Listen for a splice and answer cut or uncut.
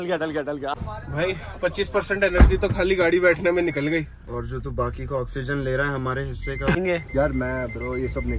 cut